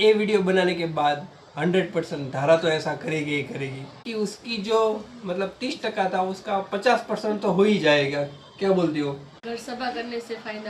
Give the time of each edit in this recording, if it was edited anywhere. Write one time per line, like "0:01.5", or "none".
0:04.0
0:09.3